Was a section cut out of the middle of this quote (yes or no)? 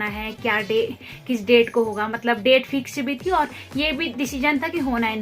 no